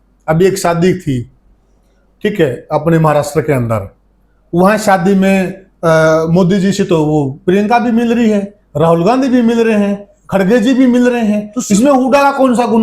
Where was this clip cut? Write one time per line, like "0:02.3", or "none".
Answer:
none